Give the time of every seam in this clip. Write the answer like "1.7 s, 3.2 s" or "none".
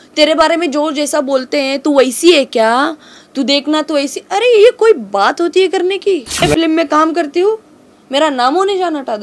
6.4 s